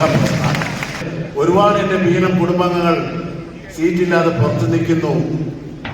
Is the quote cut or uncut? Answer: cut